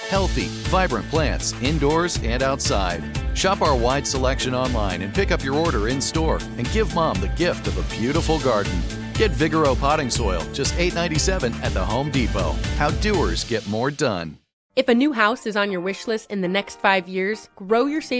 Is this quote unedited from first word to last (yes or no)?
no